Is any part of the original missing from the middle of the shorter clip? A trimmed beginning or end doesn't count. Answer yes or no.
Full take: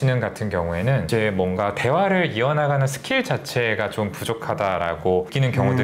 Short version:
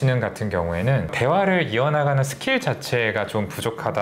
yes